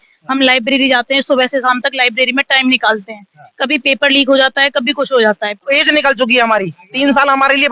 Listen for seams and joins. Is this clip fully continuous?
no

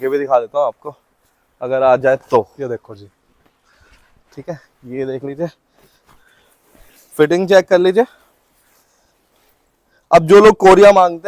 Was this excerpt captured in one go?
yes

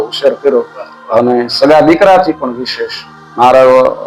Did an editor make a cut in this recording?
no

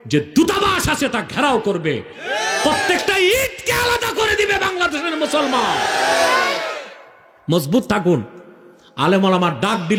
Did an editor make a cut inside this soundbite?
no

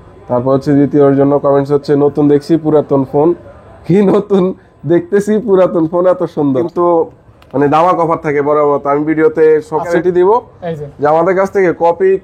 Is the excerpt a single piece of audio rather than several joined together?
no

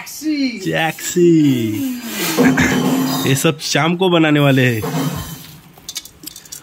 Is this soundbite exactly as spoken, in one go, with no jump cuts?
yes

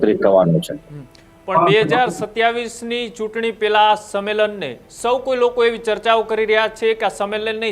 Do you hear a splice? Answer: no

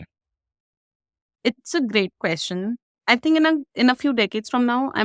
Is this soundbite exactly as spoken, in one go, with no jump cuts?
no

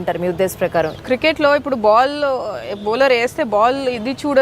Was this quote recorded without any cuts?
no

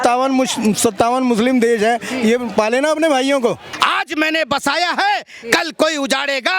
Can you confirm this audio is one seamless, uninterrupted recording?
no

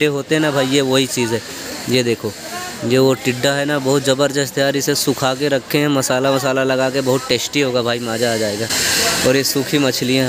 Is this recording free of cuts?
yes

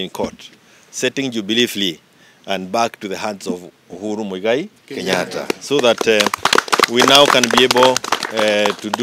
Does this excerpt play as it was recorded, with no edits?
yes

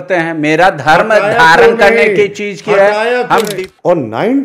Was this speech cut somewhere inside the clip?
yes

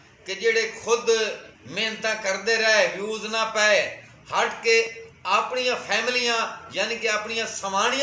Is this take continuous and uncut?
yes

